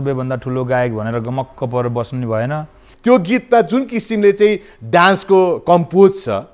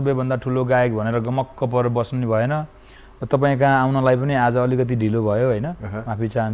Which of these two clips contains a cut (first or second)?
first